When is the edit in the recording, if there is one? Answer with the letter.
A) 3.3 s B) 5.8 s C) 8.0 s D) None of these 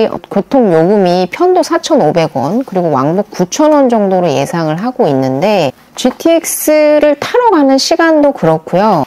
B